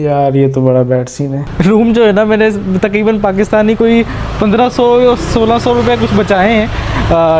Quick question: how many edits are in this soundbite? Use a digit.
1